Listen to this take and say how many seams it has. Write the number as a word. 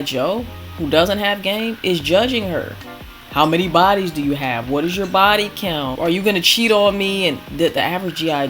one